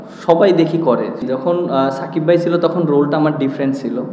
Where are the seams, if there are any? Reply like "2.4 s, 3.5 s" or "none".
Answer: 1.2 s